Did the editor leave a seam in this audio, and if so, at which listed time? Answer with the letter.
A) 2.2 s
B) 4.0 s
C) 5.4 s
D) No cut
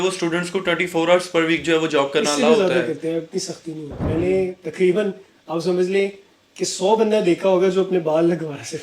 B